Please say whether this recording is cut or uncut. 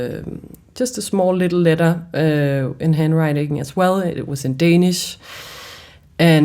cut